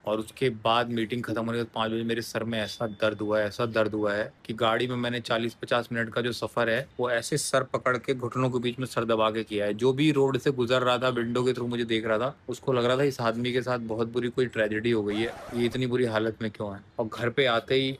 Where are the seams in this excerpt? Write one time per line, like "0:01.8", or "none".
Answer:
none